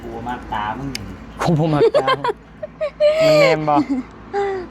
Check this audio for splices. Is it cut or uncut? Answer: uncut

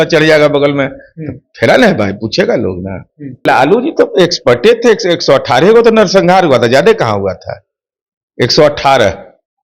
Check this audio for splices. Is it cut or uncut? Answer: cut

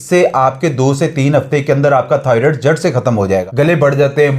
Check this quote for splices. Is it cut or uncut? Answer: cut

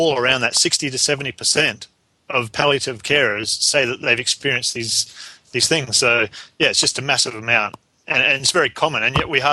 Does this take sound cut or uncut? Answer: uncut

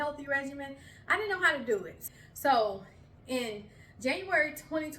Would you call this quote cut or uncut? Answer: cut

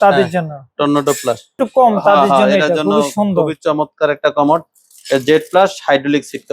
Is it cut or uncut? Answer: cut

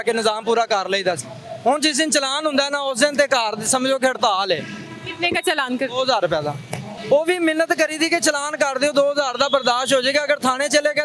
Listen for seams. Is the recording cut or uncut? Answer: uncut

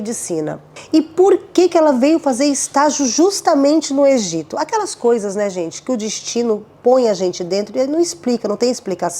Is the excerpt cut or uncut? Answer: uncut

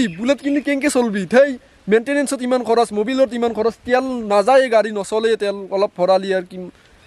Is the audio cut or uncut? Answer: uncut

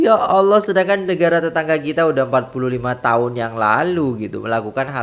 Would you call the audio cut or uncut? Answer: uncut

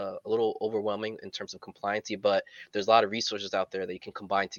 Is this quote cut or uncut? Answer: uncut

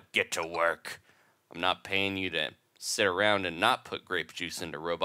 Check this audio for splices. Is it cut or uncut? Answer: uncut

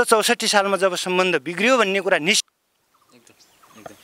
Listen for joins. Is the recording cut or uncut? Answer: cut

